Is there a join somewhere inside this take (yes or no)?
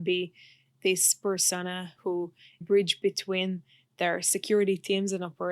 yes